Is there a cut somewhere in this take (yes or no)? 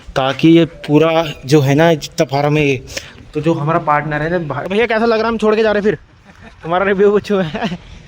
yes